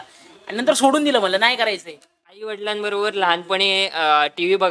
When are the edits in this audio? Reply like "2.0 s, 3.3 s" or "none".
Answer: 2.5 s